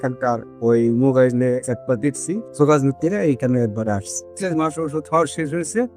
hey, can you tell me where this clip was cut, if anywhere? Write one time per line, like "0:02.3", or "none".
0:02.5
0:04.3